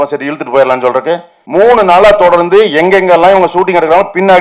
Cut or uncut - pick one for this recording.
cut